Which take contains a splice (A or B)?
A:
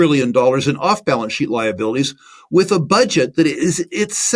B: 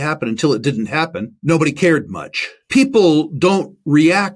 B